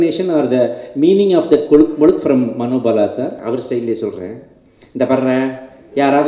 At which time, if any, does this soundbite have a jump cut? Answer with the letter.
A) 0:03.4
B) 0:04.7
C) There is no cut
A